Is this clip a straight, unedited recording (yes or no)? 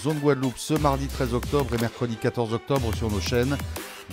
yes